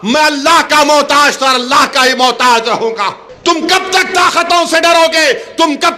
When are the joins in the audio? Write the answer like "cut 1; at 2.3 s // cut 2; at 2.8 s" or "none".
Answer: cut 1; at 3.3 s